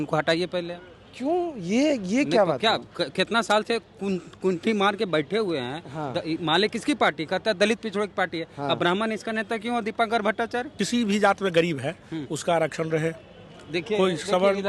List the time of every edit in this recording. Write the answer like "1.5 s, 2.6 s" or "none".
10.8 s